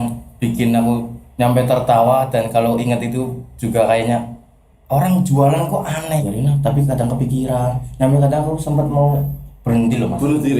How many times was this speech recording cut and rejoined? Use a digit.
1